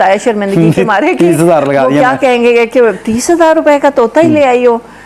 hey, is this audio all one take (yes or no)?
yes